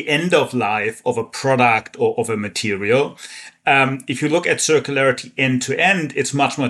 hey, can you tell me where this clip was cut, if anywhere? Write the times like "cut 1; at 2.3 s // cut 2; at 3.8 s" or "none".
none